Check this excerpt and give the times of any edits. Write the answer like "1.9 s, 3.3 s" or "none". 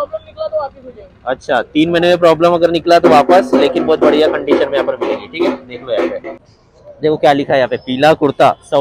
6.3 s